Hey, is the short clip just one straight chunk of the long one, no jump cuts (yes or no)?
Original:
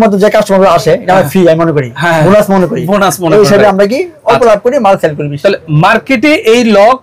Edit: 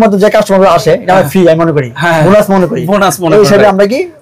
yes